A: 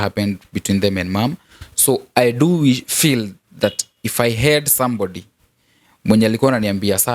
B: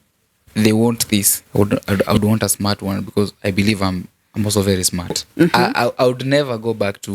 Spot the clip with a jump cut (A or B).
B